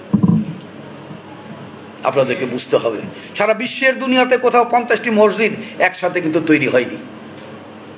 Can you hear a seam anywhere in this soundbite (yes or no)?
no